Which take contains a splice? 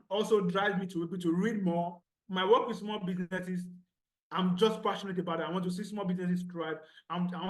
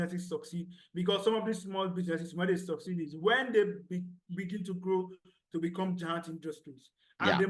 first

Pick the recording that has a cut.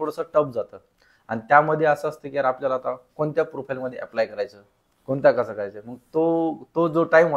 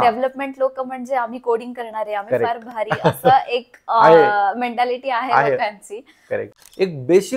second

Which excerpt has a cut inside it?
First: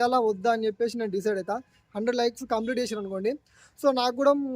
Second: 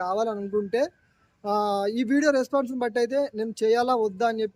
first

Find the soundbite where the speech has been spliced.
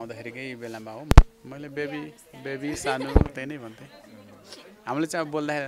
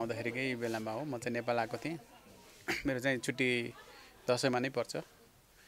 first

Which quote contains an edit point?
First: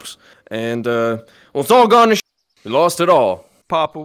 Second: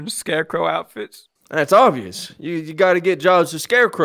first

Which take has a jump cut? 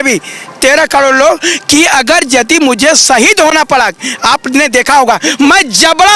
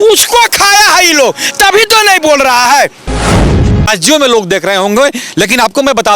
second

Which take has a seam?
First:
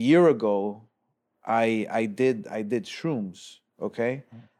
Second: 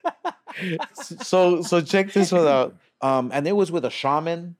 second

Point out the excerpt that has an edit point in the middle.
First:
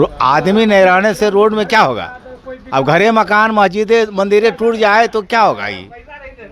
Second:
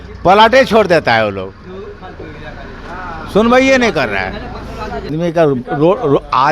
second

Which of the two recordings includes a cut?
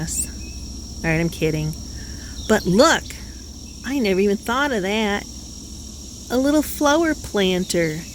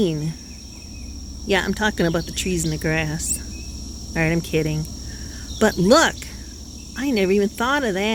first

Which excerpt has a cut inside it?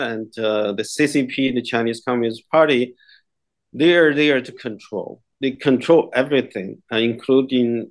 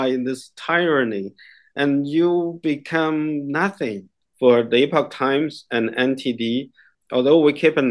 second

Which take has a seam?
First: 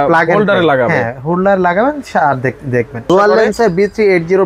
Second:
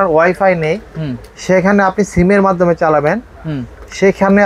first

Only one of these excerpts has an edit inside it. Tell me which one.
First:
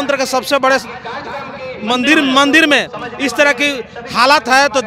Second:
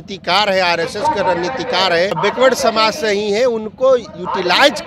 second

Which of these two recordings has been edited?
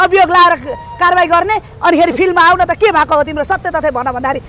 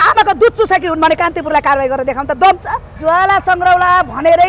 second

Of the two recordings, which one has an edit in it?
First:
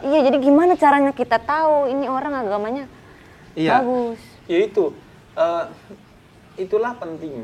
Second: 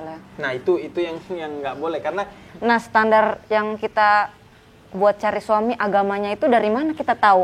second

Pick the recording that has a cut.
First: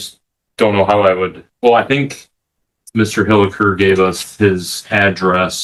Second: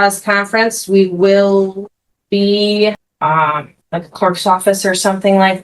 second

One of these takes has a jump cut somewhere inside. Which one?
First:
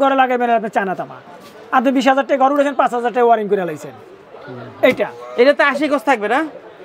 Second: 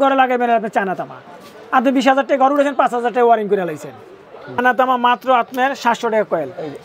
second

